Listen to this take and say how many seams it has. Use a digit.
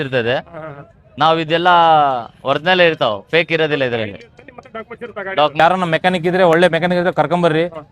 1